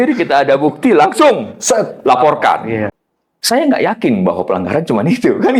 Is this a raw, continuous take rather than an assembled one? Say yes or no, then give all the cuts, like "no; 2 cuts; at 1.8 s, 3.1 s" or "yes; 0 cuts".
no; 1 cut; at 2.9 s